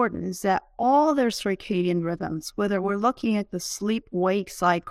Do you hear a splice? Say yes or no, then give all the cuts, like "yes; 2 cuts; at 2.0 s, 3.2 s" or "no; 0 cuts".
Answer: no; 0 cuts